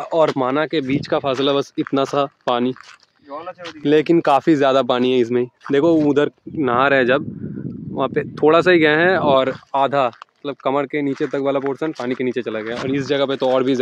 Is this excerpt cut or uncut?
uncut